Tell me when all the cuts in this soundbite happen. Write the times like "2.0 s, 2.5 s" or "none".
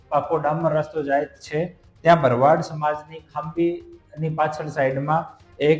none